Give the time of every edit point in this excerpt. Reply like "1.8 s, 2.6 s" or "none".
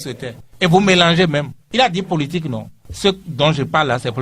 none

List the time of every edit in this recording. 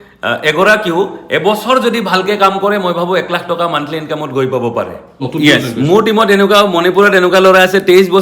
5.3 s

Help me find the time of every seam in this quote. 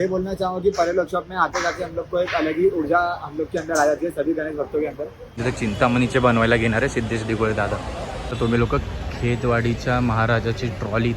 5.4 s, 8.2 s

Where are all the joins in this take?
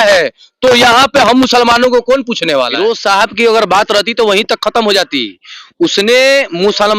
2.7 s

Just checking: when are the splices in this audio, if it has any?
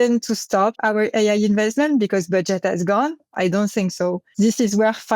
0.8 s, 3.3 s, 4.2 s

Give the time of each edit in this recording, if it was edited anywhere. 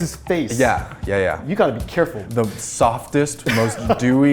2.2 s

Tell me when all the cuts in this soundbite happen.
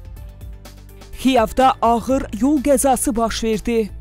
1.2 s

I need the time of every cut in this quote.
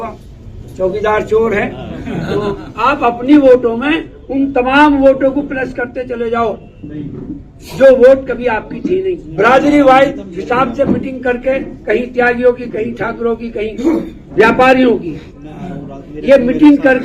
2.7 s, 9.2 s

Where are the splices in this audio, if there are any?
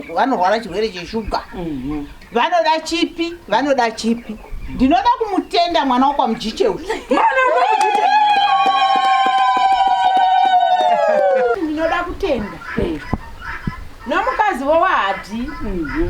11.5 s

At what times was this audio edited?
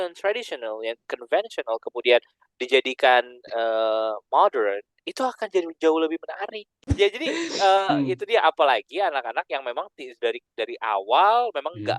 6.9 s

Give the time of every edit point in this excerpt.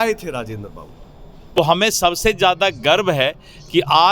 1.6 s

